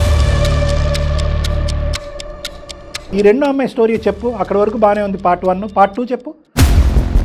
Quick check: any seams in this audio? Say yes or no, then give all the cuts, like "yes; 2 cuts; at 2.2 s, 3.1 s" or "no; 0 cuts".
yes; 1 cut; at 3.1 s